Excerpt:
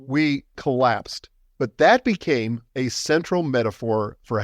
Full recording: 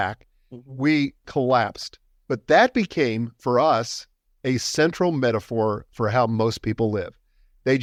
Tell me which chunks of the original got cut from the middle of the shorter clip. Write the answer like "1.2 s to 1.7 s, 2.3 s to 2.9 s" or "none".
3.3 s to 4.3 s